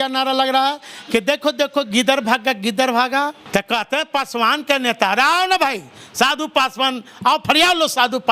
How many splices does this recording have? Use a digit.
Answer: 1